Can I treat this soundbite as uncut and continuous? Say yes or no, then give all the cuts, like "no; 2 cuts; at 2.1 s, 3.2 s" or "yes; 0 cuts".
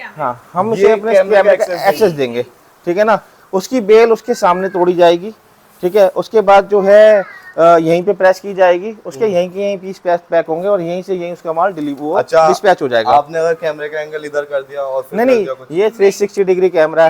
yes; 0 cuts